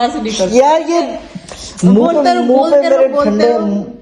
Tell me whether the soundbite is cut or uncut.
uncut